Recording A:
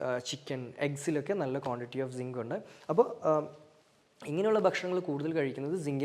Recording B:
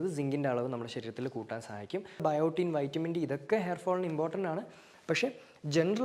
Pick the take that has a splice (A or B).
B